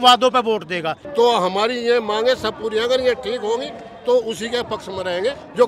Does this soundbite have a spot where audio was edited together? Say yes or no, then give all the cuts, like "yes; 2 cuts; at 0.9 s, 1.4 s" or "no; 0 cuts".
yes; 1 cut; at 1.0 s